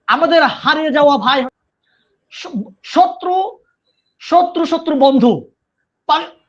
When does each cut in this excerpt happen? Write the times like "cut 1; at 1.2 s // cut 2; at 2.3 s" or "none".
cut 1; at 1.5 s